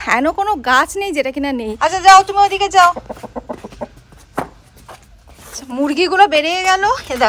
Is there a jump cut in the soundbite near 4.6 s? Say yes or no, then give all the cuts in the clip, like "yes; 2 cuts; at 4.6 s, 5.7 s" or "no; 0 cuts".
no; 1 cut; at 1.7 s